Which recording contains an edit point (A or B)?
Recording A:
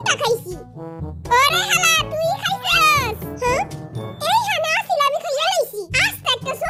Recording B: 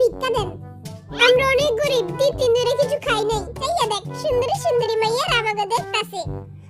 B